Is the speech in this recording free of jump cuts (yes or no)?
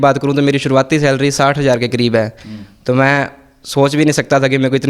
yes